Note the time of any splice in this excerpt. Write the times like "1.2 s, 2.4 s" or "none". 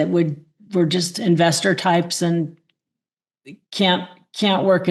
none